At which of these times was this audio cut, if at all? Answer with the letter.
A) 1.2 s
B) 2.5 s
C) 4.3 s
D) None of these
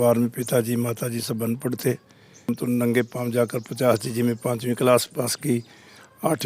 B